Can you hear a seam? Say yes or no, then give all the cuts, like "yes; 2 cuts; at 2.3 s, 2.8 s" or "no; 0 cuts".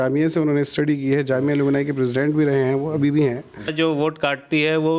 yes; 1 cut; at 3.7 s